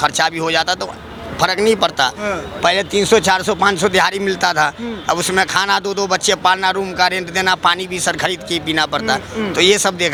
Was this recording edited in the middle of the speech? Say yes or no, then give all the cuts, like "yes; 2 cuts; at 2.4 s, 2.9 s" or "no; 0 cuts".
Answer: no; 0 cuts